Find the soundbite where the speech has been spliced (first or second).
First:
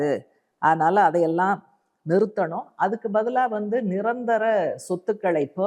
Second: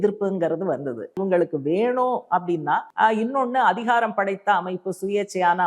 second